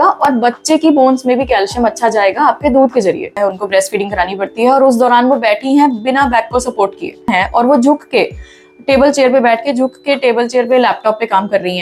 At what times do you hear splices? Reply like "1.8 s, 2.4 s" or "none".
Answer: 3.4 s, 7.3 s